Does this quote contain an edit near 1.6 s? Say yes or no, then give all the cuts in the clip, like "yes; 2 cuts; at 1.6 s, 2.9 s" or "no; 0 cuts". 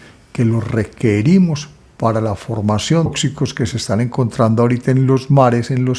no; 1 cut; at 3.1 s